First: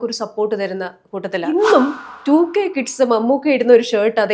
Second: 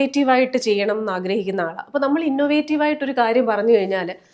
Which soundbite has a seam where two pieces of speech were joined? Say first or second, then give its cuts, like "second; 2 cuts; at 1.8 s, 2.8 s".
first; 1 cut; at 1.5 s